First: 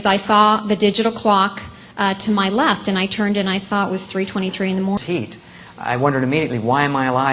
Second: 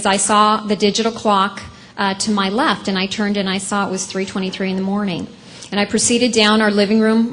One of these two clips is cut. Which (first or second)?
second